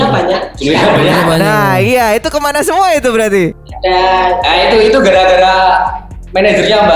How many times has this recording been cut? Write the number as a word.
one